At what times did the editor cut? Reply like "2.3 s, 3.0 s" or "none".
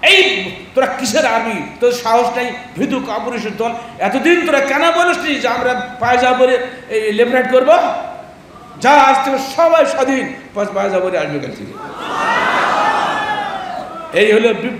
none